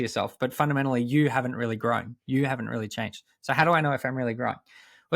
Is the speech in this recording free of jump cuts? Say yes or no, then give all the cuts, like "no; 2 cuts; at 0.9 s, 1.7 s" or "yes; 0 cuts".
yes; 0 cuts